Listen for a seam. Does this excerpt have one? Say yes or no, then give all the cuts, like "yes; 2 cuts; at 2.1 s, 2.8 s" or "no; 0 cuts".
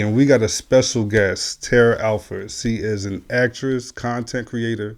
no; 0 cuts